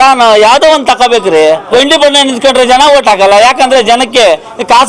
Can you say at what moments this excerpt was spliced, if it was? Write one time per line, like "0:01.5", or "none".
0:01.7